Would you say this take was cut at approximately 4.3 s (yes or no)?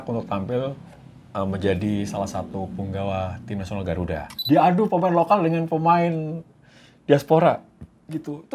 yes